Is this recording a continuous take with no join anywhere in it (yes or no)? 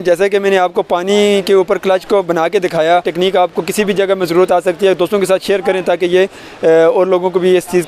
no